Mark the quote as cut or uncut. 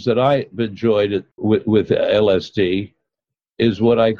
cut